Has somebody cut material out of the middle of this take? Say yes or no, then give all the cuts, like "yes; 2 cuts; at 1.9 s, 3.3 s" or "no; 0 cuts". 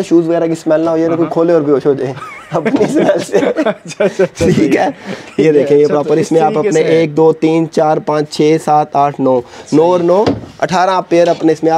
no; 0 cuts